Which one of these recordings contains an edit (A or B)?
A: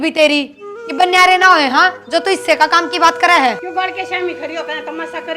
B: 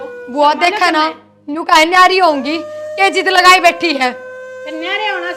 A